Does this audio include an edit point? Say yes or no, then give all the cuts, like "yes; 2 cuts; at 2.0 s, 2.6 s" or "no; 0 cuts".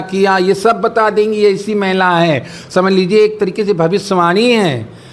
no; 0 cuts